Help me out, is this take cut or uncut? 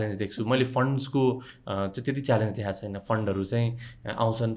uncut